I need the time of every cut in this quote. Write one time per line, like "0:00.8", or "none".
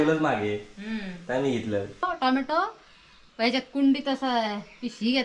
0:02.0